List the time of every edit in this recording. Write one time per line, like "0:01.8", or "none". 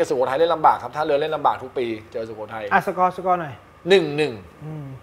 none

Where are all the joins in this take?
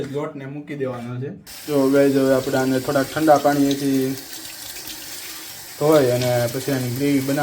0:01.5

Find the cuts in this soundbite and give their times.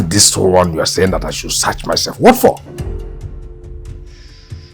0:02.6

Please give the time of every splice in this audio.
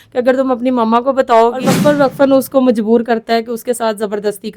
0:01.7

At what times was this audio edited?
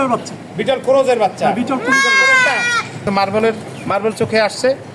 0:03.0

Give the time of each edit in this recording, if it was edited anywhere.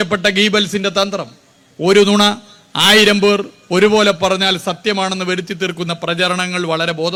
none

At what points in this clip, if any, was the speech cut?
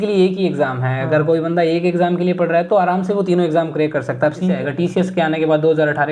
0:04.5

